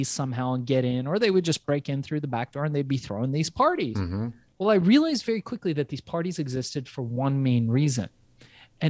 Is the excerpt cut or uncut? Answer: cut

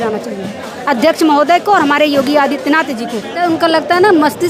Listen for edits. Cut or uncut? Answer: cut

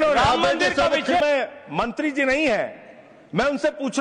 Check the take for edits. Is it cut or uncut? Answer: cut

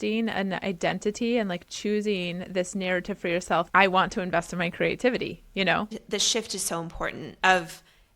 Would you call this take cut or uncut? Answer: cut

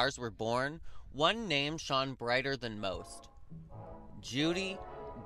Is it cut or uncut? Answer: uncut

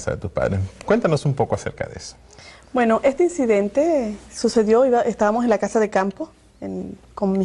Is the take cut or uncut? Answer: cut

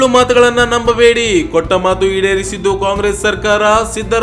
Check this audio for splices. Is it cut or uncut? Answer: uncut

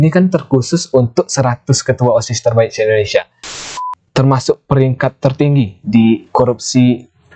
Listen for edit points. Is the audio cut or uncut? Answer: cut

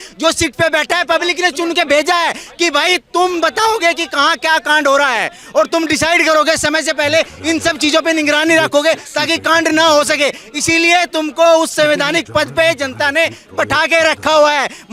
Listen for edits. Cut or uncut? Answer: uncut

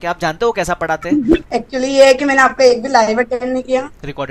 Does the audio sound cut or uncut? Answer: cut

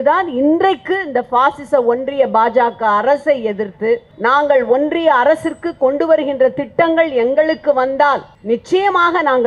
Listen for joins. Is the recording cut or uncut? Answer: cut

